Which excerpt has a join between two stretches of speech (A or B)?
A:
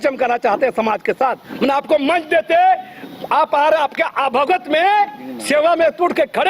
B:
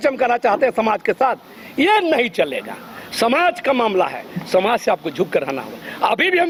A